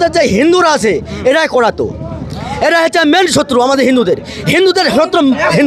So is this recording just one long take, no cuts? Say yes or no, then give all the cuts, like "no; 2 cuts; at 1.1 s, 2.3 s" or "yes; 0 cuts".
yes; 0 cuts